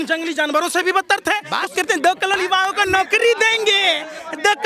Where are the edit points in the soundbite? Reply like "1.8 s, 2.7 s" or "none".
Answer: 1.5 s